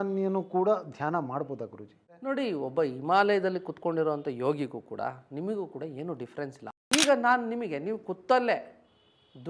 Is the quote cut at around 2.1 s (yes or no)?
yes